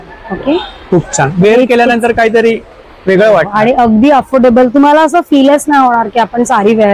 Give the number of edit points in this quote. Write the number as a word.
zero